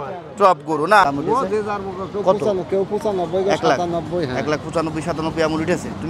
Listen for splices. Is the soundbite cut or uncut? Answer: cut